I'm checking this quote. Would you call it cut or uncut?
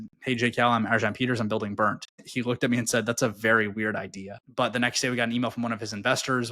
cut